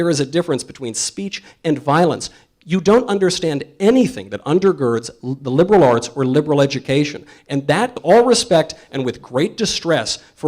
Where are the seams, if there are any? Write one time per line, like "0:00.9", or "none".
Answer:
0:07.9